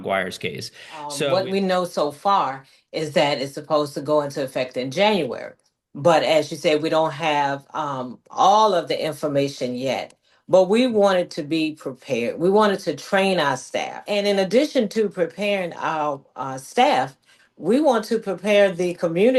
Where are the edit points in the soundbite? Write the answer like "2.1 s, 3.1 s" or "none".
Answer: 1.2 s, 14.0 s

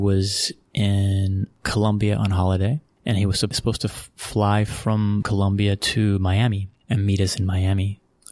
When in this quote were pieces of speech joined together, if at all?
3.6 s, 5.3 s

